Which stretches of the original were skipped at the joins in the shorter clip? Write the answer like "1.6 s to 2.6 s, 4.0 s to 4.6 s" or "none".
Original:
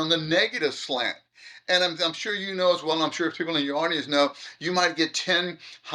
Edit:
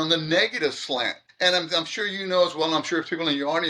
1.2 s to 1.5 s